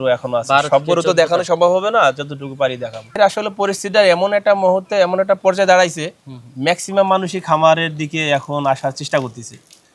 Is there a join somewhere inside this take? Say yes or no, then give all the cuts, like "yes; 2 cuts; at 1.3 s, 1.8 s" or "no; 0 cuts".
yes; 1 cut; at 3.2 s